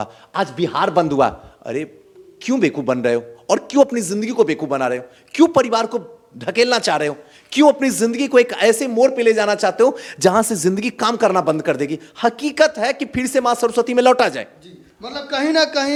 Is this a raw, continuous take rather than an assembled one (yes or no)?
yes